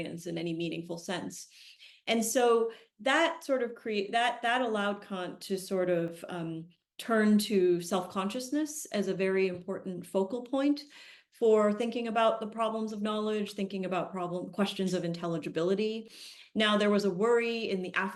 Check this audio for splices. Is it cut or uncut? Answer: uncut